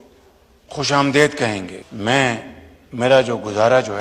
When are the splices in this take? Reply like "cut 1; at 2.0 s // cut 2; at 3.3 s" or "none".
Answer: cut 1; at 1.8 s